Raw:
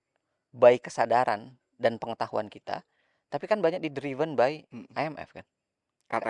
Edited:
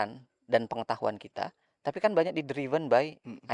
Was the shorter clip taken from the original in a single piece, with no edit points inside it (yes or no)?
no